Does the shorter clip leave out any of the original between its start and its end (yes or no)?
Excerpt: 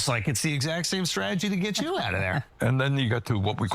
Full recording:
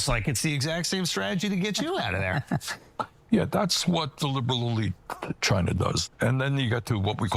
yes